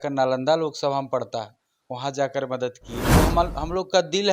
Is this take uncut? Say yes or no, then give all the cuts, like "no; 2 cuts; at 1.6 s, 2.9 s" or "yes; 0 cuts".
no; 1 cut; at 3.0 s